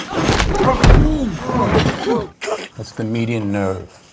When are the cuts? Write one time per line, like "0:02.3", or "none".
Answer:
0:02.3